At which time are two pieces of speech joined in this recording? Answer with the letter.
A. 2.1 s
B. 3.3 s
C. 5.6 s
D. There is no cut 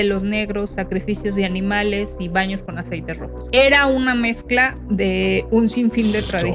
B